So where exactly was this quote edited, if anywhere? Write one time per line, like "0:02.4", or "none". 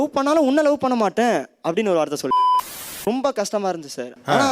0:02.5